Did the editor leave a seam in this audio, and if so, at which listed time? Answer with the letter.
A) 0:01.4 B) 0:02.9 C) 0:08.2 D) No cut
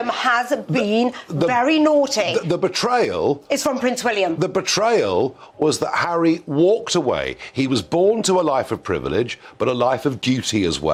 D